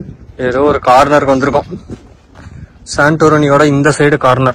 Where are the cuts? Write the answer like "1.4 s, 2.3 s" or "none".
none